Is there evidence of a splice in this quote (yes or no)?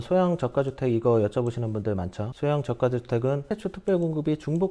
yes